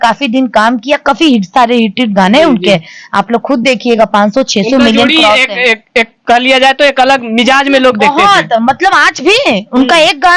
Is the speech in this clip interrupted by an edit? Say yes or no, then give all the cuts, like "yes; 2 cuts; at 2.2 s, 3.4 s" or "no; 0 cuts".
no; 0 cuts